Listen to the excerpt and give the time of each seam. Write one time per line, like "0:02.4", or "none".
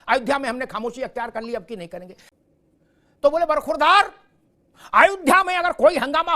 0:02.2